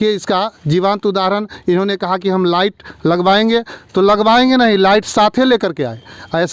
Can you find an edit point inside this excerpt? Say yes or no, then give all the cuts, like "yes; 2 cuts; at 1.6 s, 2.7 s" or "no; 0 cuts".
no; 0 cuts